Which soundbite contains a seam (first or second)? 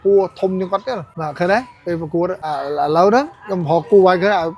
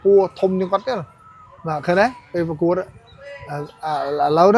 first